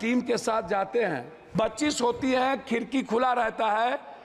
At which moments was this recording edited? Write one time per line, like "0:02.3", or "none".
0:01.4